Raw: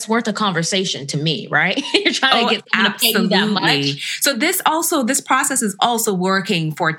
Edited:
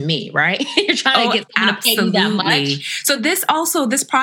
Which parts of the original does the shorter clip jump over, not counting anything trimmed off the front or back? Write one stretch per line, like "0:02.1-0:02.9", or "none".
none